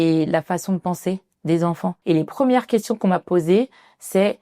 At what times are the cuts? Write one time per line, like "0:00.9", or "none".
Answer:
0:01.9